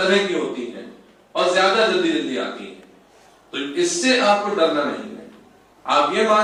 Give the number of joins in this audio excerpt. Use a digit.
0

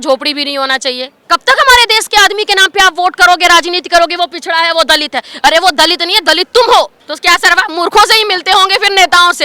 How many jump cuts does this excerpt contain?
2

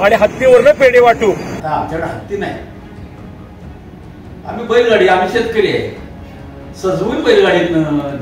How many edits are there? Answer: 1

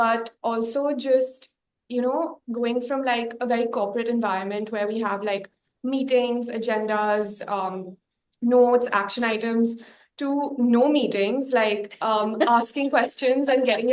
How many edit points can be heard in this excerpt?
0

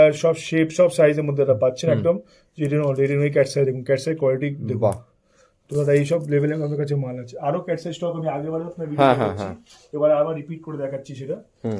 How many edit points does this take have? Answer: 0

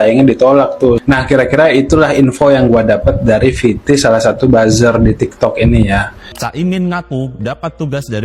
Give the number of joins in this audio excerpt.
1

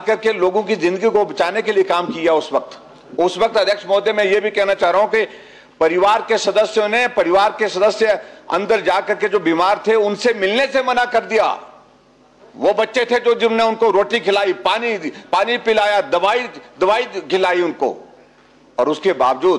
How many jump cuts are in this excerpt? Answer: 0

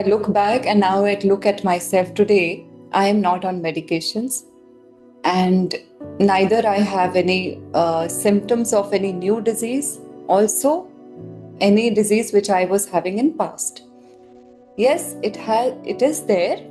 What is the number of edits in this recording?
0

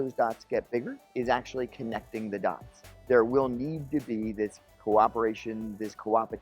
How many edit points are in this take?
2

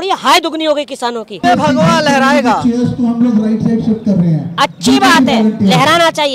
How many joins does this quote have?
1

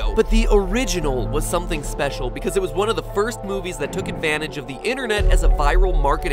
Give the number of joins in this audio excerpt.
0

